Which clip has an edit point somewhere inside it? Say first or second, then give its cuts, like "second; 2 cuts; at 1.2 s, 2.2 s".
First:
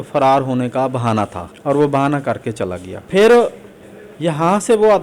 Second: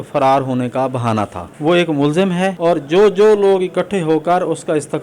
second; 2 cuts; at 1.5 s, 2.6 s